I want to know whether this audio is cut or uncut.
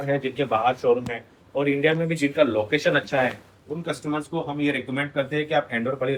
uncut